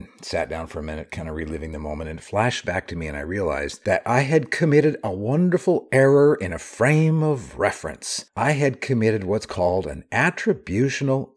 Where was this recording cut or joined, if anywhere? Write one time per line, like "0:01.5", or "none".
none